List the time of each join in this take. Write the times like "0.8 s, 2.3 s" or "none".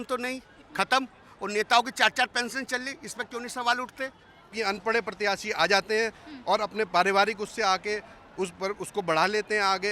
4.5 s